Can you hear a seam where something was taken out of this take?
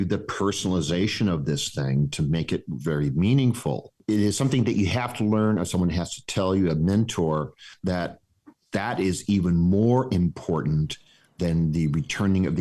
yes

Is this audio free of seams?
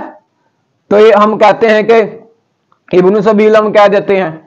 yes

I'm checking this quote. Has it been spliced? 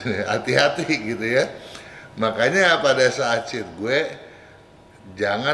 no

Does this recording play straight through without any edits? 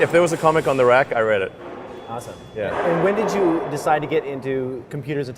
no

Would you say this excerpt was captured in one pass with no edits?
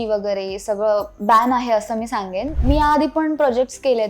no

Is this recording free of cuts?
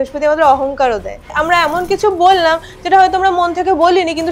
no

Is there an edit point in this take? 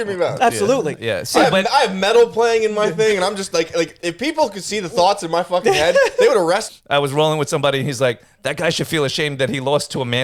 yes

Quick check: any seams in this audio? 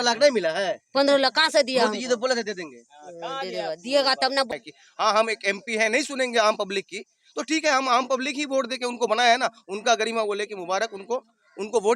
yes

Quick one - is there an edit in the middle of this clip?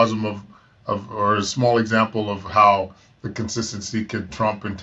no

